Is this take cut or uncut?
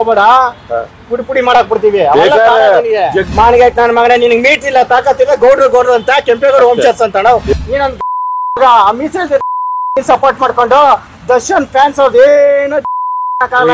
cut